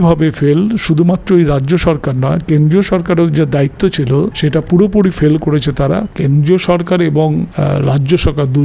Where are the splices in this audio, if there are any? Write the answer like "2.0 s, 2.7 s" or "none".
4.3 s, 6.1 s, 7.5 s